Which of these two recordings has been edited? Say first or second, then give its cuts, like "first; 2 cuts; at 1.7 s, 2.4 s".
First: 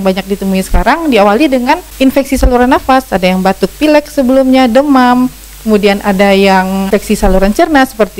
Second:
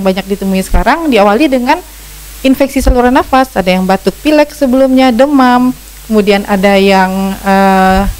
first; 2 cuts; at 1.9 s, 6.9 s